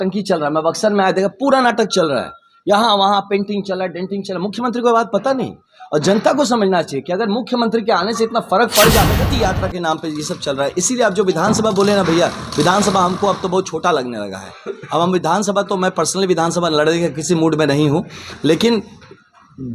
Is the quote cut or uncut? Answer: cut